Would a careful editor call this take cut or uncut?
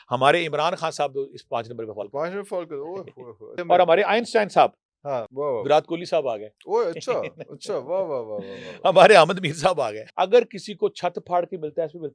cut